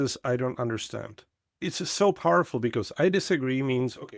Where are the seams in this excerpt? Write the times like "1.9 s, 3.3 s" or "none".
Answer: 1.4 s